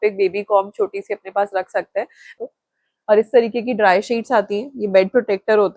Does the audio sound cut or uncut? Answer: cut